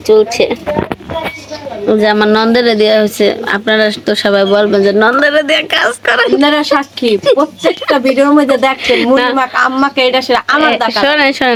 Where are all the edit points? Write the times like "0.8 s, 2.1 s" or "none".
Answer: none